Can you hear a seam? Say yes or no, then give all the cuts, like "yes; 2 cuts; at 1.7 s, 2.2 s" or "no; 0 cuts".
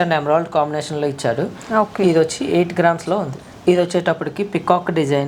no; 0 cuts